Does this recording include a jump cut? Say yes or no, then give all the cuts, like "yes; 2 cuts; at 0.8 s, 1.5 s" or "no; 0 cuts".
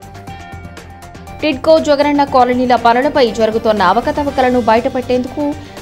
yes; 1 cut; at 1.4 s